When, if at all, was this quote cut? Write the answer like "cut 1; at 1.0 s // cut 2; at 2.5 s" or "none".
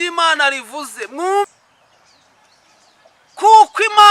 cut 1; at 1.5 s